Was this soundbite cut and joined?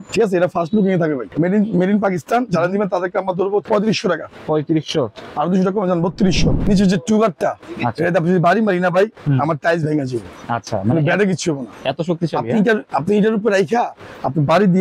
yes; 3 cuts; at 1.3 s, 3.6 s, 6.7 s

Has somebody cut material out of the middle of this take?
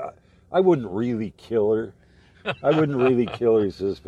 no; 0 cuts

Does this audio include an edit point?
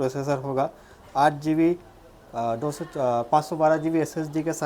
no; 0 cuts

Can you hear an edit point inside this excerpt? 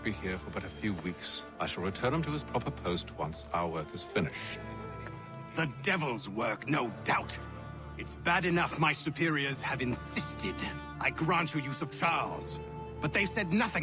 no; 0 cuts

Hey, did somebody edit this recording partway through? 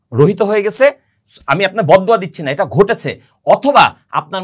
no; 0 cuts

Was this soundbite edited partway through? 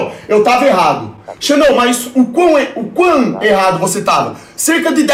no; 0 cuts

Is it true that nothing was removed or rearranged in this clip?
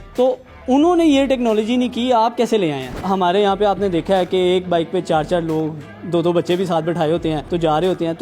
no; 2 cuts; at 2.9 s, 7.4 s

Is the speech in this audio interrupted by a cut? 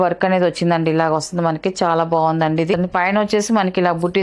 yes; 1 cut; at 2.7 s

